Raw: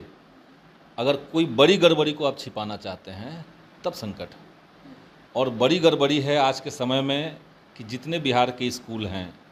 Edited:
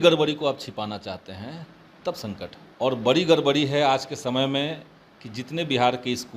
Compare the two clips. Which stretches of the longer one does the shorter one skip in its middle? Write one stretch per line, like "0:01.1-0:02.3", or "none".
0:04.4-0:05.2